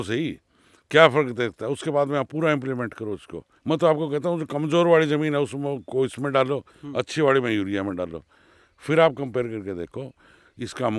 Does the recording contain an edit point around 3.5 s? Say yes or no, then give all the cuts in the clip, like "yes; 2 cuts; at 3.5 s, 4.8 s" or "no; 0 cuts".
yes; 1 cut; at 3.5 s